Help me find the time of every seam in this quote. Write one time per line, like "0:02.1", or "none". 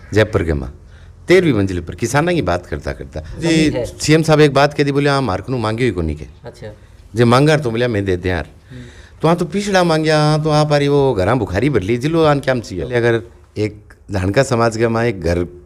0:03.4
0:12.9